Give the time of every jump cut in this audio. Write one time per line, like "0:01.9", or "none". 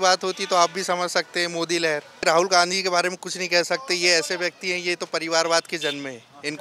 0:02.2